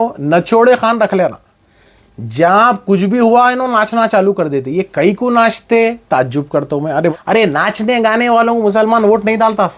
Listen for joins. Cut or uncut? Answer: cut